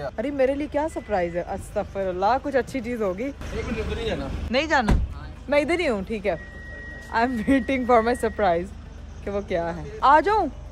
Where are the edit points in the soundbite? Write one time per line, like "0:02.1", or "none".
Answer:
none